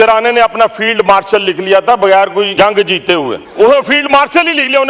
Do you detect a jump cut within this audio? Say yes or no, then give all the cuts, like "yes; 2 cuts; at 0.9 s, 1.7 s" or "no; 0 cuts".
yes; 2 cuts; at 2.5 s, 3.4 s